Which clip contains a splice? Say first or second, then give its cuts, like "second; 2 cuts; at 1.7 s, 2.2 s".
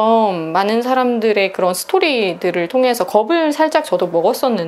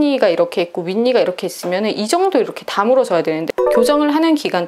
second; 1 cut; at 3.5 s